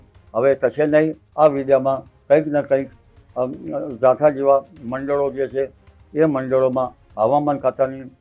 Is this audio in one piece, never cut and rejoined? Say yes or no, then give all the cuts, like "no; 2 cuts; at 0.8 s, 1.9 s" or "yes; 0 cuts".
no; 1 cut; at 1.2 s